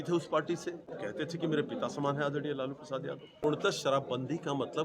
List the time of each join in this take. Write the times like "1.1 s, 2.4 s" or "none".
0.9 s, 3.4 s